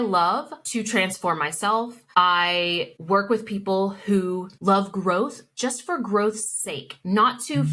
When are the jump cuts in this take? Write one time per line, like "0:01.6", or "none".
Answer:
none